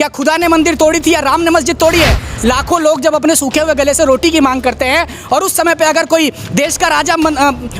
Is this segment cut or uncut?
cut